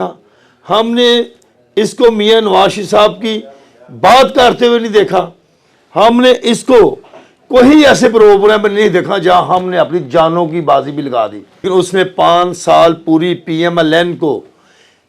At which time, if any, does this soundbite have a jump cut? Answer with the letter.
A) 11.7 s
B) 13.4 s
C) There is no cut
A